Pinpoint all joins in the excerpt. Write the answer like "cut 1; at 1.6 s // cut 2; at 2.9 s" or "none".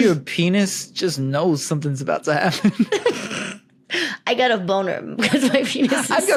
none

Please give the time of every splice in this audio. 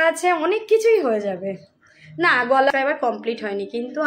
cut 1; at 2.7 s

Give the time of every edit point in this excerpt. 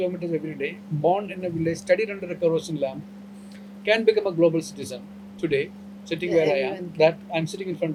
none

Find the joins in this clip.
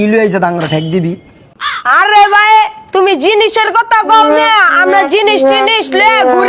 none

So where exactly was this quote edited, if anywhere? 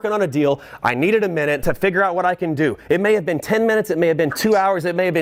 none

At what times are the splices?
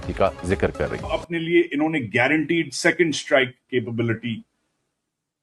cut 1; at 1.1 s

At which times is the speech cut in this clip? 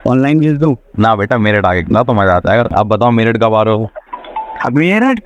cut 1; at 2.7 s

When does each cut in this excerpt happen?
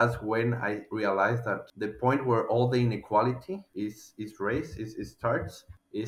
none

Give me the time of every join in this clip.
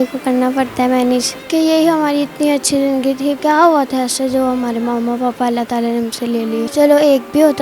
cut 1; at 1.4 s // cut 2; at 3.4 s // cut 3; at 6.7 s

